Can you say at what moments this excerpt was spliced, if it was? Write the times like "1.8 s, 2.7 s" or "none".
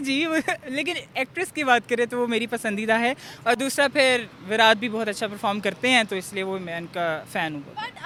none